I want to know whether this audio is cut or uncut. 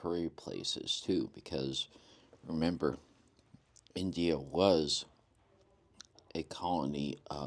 uncut